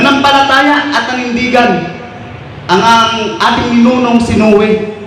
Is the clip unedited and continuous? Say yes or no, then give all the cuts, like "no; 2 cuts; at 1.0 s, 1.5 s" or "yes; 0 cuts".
yes; 0 cuts